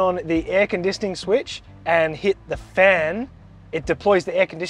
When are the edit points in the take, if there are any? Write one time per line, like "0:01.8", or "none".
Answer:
none